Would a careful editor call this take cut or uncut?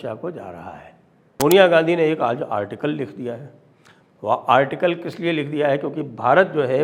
cut